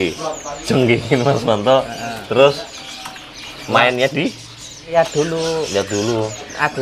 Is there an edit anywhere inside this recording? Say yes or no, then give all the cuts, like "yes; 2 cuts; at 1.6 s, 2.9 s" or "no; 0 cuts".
yes; 1 cut; at 4.9 s